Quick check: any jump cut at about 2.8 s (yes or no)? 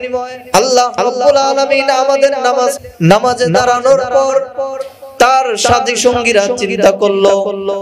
yes